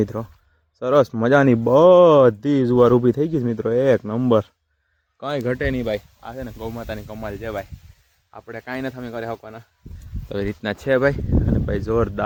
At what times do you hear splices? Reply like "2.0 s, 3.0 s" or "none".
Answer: none